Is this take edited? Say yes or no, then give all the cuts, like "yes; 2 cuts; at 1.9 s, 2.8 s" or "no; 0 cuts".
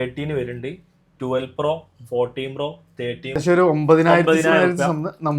yes; 1 cut; at 3.4 s